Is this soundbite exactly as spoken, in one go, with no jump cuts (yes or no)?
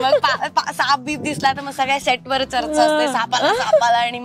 yes